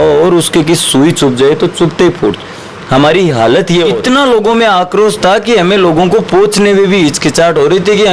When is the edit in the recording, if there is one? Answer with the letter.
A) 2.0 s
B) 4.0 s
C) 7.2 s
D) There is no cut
B